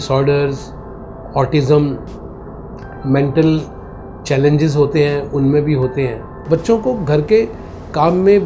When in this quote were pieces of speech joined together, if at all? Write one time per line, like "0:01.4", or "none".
0:06.4